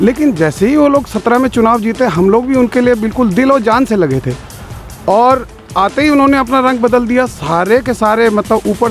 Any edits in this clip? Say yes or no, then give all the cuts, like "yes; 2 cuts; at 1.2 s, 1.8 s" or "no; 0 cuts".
no; 0 cuts